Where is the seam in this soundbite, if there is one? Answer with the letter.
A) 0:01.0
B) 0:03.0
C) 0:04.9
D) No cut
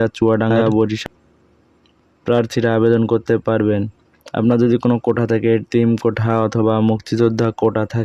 A